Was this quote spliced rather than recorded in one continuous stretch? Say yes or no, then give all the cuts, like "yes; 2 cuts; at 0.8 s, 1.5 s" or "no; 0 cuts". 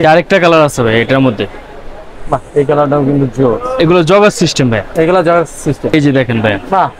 yes; 2 cuts; at 3.7 s, 5.9 s